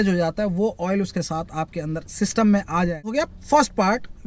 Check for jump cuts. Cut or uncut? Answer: cut